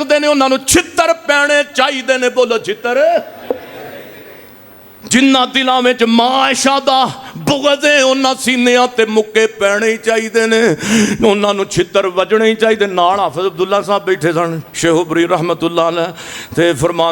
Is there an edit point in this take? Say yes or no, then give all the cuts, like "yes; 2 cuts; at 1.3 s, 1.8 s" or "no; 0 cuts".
no; 0 cuts